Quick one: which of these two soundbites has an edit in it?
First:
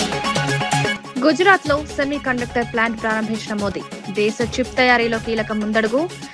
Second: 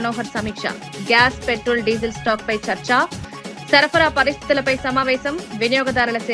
first; 1 cut; at 0.9 s

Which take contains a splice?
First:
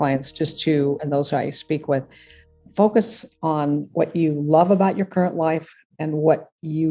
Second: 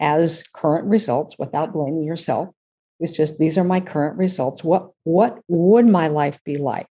first; 1 cut; at 2.6 s

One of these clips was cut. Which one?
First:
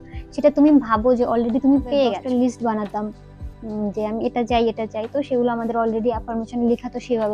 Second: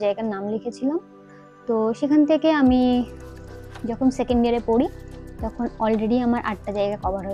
first; 1 cut; at 2.2 s

